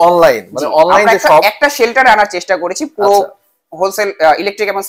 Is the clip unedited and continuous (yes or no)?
yes